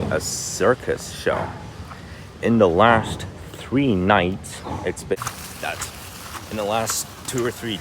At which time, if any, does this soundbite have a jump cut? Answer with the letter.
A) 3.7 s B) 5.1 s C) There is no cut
B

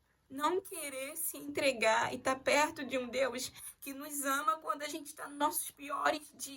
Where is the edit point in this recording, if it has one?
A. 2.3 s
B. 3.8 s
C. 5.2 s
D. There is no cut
D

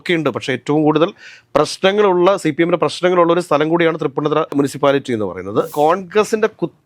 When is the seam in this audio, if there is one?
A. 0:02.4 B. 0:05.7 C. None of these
B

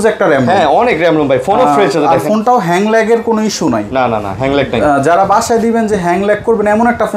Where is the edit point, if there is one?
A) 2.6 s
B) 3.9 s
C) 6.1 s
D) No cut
D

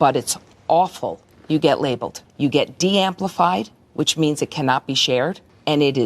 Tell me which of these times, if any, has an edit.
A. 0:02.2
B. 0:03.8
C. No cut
A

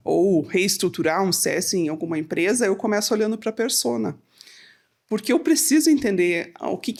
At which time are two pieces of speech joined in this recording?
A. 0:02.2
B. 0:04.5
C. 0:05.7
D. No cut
D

